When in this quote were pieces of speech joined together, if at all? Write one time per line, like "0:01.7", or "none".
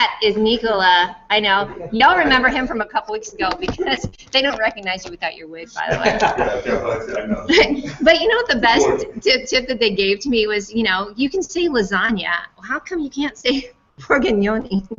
0:10.2